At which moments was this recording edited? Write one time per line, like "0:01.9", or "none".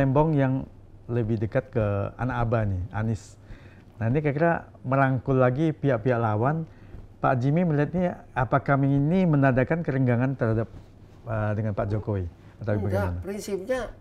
none